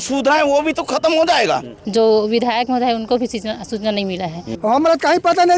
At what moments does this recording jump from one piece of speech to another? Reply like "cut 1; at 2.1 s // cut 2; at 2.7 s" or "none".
cut 1; at 1.7 s // cut 2; at 4.4 s